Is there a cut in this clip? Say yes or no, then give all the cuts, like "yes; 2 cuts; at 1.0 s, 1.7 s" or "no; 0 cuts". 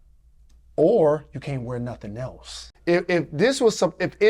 yes; 1 cut; at 2.7 s